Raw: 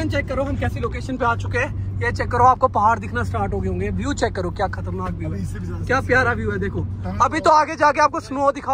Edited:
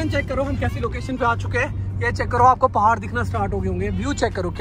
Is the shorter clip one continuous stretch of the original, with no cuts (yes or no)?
yes